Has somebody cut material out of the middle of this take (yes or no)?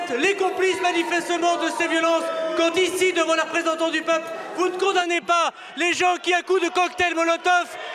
no